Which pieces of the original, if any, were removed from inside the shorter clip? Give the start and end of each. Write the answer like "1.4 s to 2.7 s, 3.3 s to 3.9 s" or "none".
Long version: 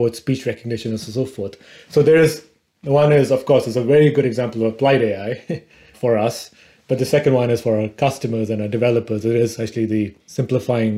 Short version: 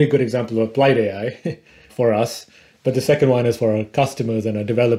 none